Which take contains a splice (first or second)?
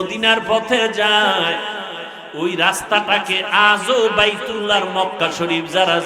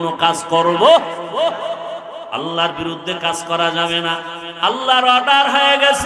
second